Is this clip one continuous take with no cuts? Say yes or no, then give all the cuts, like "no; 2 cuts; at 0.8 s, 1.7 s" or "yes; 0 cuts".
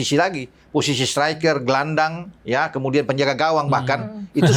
yes; 0 cuts